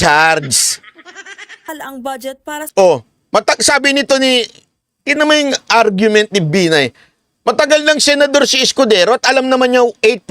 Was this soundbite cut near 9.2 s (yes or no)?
no